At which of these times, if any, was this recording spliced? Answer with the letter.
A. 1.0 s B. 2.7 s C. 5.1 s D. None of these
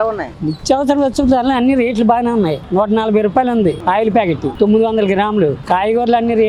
D